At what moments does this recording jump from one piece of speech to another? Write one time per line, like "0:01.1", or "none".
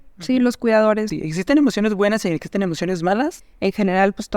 0:01.1
0:03.5